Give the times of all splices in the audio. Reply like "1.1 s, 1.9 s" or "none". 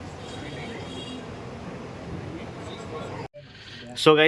3.3 s